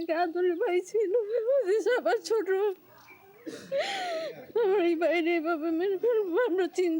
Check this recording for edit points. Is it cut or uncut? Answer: uncut